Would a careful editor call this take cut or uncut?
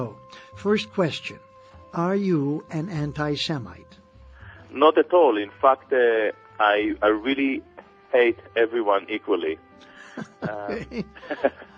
uncut